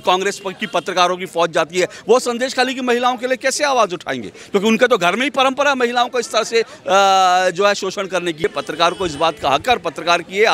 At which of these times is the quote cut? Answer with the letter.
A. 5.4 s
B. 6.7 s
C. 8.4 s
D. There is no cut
C